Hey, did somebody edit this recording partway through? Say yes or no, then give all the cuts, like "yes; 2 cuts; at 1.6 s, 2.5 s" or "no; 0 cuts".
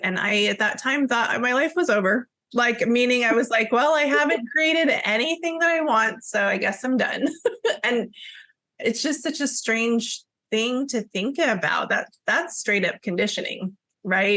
no; 0 cuts